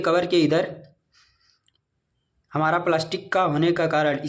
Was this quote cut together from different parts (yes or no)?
no